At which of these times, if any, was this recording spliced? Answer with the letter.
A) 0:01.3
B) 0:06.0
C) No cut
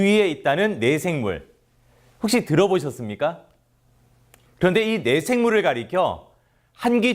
A